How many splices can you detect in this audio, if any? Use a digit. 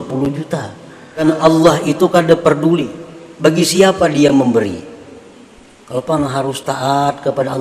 1